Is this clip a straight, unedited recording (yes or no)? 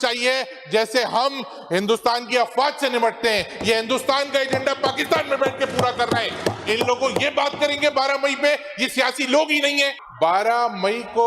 no